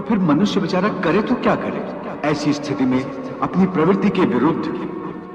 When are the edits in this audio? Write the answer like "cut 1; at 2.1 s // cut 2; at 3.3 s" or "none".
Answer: cut 1; at 2.1 s